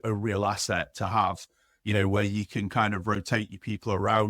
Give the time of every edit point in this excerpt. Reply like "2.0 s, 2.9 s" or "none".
none